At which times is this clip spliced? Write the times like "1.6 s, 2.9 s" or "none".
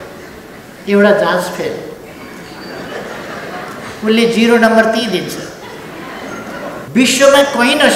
6.9 s